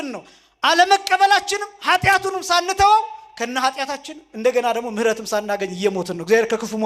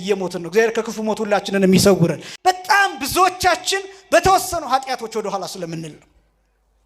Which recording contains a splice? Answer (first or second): second